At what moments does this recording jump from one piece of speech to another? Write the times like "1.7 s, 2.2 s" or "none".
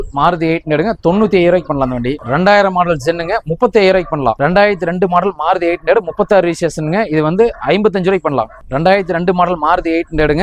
none